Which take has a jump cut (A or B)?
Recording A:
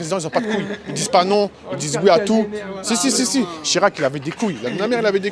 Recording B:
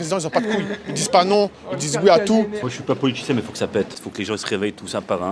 B